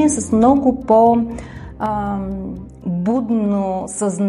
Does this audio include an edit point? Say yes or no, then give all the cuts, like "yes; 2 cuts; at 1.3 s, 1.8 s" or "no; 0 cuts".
no; 0 cuts